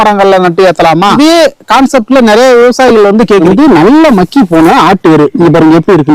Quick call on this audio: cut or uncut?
cut